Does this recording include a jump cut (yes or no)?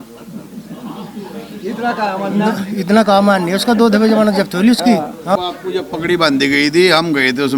yes